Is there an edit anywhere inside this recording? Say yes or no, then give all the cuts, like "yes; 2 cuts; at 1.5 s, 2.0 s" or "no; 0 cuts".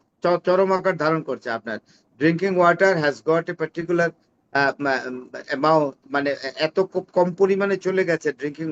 no; 0 cuts